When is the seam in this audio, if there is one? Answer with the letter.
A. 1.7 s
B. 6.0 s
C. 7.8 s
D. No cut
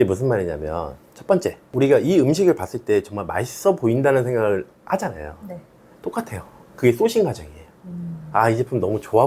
D